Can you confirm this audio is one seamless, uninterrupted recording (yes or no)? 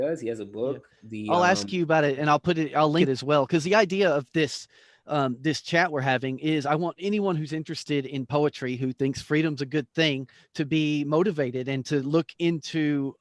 no